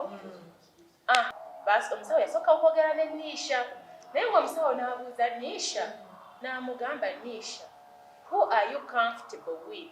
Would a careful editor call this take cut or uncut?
cut